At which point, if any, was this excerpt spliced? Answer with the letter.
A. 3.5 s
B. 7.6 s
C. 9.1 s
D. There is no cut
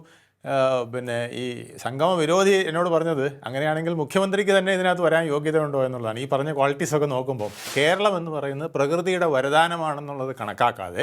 B